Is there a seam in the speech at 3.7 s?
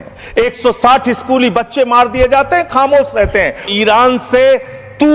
yes; 1 cut; at 3.7 s

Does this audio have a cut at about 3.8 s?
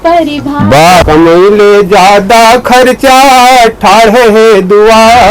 no; 1 cut; at 1.0 s

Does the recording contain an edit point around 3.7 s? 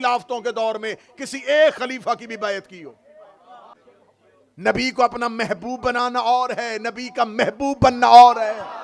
yes; 1 cut; at 3.7 s

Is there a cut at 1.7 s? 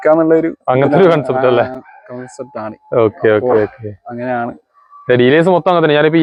no; 0 cuts

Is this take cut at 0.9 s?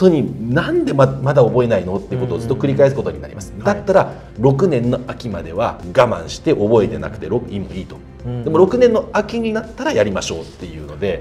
no; 0 cuts

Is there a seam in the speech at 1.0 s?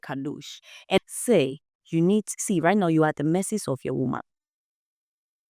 yes; 1 cut; at 1.0 s

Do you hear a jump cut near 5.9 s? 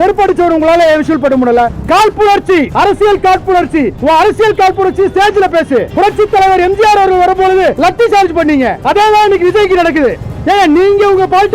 yes; 4 cuts; at 1.7 s, 2.7 s, 3.9 s, 5.9 s

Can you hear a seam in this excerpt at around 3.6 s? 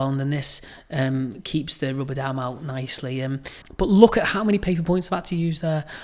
yes; 1 cut; at 3.6 s

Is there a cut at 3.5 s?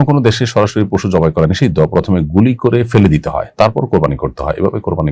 no; 0 cuts

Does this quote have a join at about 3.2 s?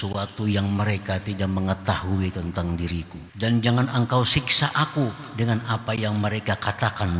yes; 1 cut; at 3.2 s

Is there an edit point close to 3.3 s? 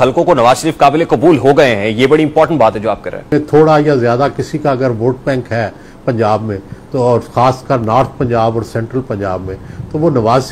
yes; 1 cut; at 3.3 s

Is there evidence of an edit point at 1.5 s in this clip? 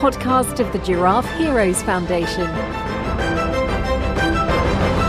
no; 0 cuts

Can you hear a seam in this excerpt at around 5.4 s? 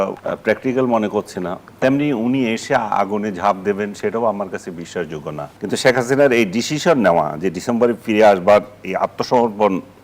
yes; 1 cut; at 5.4 s

